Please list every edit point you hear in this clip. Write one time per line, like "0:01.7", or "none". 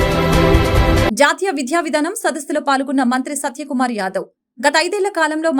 none